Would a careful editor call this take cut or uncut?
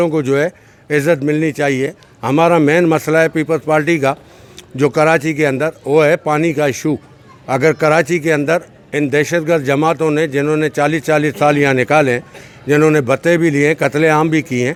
uncut